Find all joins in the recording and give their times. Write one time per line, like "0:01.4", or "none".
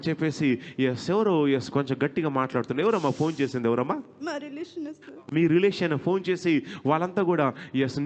none